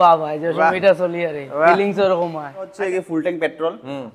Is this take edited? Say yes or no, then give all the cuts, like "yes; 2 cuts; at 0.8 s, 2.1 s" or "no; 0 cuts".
yes; 1 cut; at 2.7 s